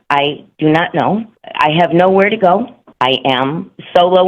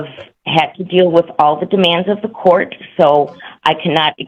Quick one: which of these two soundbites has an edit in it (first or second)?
first